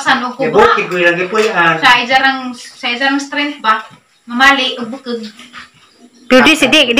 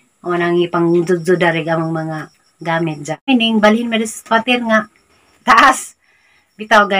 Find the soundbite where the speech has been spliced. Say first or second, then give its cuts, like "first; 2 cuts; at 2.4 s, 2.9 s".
second; 1 cut; at 3.3 s